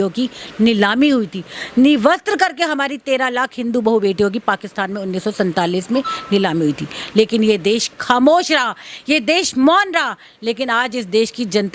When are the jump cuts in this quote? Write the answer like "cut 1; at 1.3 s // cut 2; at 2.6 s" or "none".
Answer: none